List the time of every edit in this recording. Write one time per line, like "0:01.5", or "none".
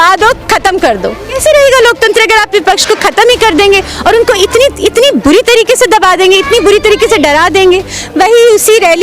0:01.3
0:08.0